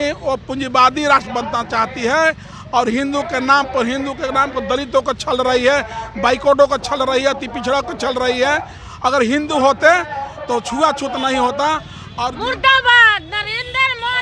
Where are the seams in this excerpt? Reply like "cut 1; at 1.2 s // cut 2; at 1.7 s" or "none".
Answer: cut 1; at 12.3 s